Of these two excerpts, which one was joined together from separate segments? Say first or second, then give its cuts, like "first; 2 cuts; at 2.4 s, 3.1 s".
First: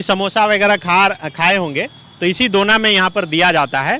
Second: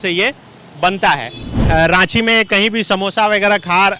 second; 1 cut; at 1.5 s